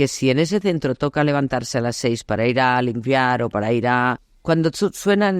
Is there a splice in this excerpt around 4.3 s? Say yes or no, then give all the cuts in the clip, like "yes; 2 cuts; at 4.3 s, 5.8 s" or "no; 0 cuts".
yes; 1 cut; at 4.3 s